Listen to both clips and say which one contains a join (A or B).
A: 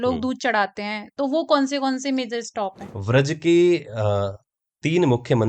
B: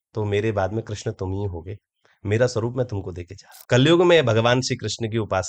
B